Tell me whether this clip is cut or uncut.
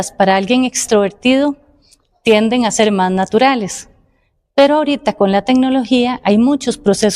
uncut